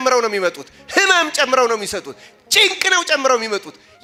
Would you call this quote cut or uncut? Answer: uncut